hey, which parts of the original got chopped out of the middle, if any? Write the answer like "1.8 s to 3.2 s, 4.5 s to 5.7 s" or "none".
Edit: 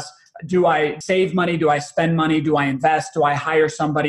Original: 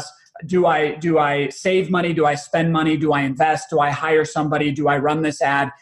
1.0 s to 1.5 s